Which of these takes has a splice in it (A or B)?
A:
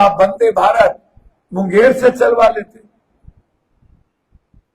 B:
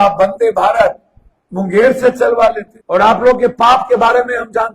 B